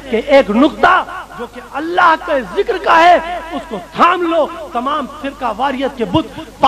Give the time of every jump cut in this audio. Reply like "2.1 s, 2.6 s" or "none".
none